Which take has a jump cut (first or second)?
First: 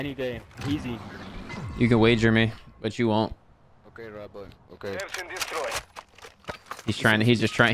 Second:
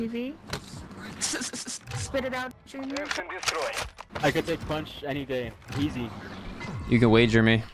second